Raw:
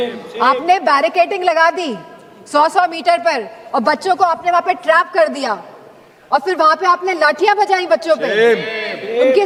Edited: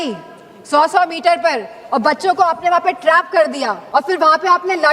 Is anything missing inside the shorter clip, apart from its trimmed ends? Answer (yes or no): yes